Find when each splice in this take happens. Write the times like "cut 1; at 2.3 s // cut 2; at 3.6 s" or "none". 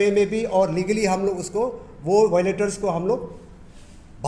none